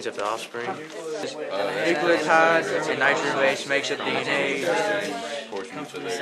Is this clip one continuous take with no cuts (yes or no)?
no